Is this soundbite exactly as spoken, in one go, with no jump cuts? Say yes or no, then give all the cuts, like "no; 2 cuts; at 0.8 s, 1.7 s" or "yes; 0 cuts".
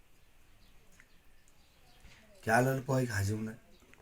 no; 1 cut; at 1.9 s